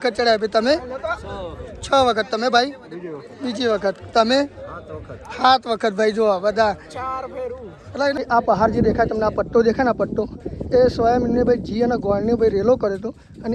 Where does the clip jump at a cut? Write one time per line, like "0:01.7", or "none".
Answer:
0:08.2

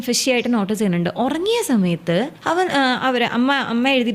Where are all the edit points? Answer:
0:02.4

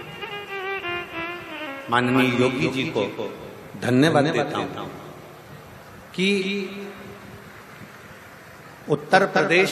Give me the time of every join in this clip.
none

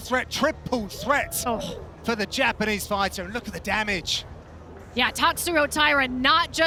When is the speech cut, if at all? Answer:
none

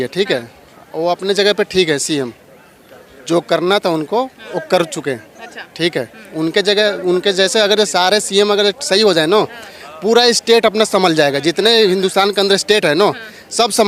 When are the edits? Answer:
none

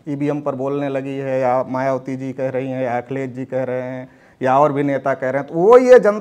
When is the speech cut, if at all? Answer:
none

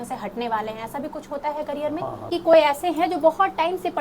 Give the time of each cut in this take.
0:02.3

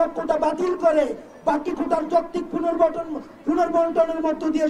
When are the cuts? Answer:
none

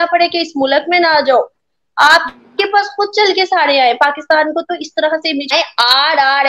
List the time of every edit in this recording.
0:05.5

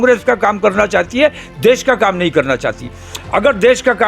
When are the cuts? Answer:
none

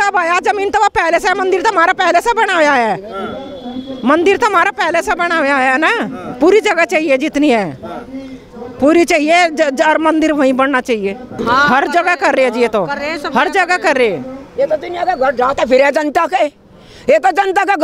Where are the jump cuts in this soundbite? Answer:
none

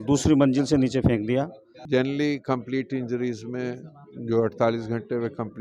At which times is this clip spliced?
0:01.8

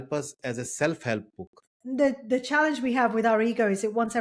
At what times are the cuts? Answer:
0:01.7

